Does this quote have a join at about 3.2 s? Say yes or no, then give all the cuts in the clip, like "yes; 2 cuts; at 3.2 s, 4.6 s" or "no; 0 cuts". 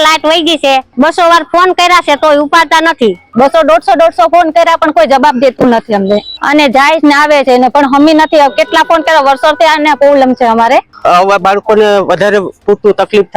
yes; 3 cuts; at 3.2 s, 6.3 s, 10.9 s